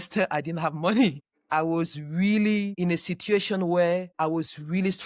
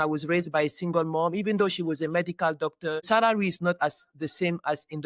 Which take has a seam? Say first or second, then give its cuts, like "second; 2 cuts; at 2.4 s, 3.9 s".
second; 1 cut; at 3.1 s